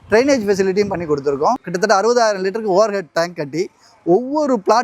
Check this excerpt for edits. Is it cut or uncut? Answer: cut